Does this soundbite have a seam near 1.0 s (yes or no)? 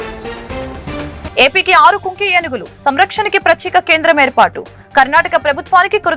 yes